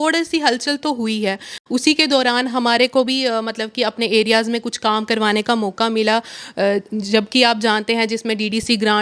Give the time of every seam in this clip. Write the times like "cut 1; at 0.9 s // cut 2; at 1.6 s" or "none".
none